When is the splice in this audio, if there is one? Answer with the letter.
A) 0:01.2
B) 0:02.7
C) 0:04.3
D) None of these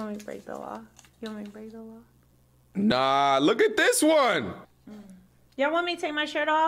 C